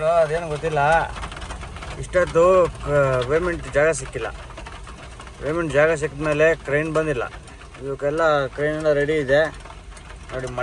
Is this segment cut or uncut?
uncut